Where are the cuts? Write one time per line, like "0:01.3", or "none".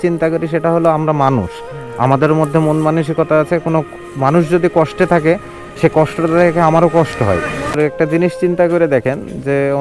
0:07.8